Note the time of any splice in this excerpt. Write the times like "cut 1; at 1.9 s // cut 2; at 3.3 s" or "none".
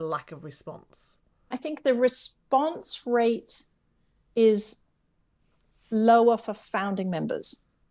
cut 1; at 1.6 s